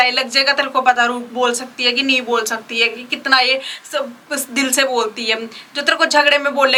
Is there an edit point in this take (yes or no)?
no